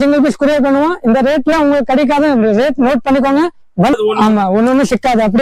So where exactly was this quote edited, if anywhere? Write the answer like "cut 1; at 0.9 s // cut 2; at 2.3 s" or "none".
cut 1; at 3.9 s

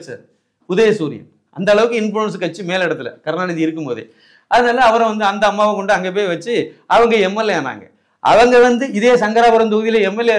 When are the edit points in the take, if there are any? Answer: none

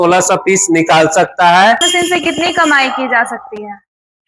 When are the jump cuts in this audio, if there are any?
none

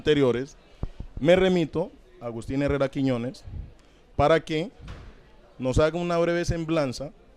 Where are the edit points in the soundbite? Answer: cut 1; at 2.3 s

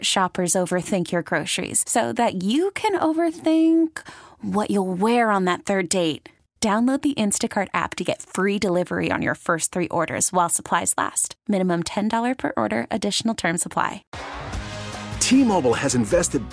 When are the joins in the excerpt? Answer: cut 1; at 14.1 s

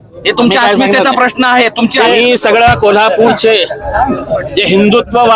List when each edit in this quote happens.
cut 1; at 2.2 s

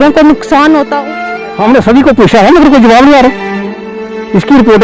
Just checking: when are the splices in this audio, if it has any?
cut 1; at 1.1 s

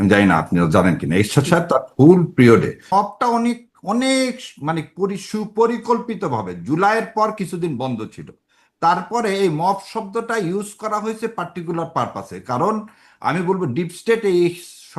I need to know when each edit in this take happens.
cut 1; at 2.9 s

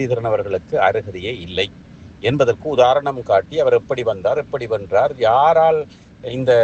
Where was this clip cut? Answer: none

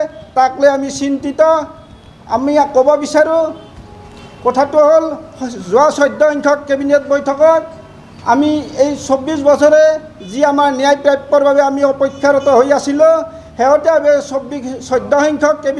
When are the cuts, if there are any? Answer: none

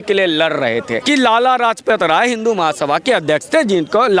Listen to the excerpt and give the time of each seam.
cut 1; at 0.9 s

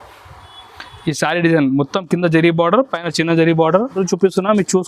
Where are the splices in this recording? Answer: cut 1; at 3.9 s

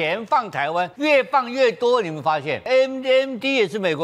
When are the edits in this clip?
cut 1; at 0.9 s // cut 2; at 2.6 s

